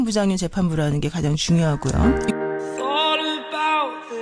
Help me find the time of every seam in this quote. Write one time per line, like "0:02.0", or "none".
0:01.8